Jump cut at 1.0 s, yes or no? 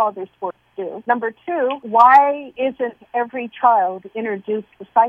yes